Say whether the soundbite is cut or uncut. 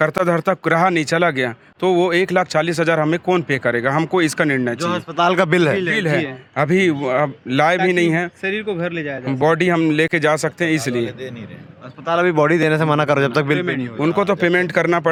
uncut